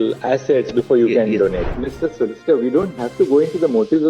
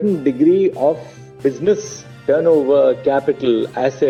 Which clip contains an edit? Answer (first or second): first